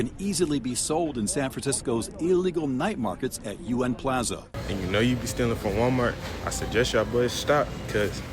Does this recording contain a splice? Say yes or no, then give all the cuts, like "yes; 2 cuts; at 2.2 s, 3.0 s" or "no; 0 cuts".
yes; 1 cut; at 4.5 s